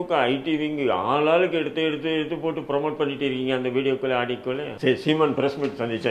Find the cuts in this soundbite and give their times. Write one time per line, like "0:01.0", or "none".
0:04.7